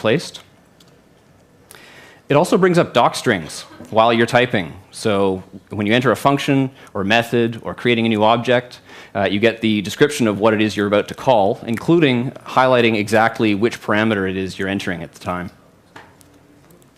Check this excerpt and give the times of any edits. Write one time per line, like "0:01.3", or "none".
0:02.3